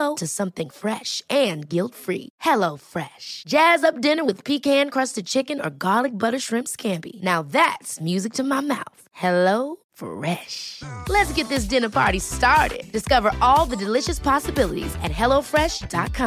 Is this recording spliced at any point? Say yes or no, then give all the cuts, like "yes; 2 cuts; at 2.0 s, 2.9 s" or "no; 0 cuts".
no; 0 cuts